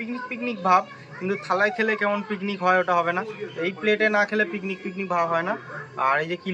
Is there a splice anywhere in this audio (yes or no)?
no